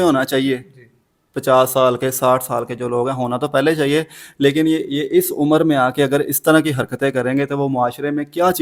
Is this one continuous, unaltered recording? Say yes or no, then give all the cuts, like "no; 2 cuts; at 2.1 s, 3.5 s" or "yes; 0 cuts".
yes; 0 cuts